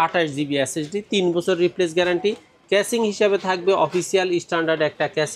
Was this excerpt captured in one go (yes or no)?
yes